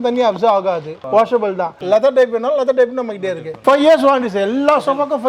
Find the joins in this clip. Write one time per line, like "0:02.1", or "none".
0:01.0
0:01.7
0:03.5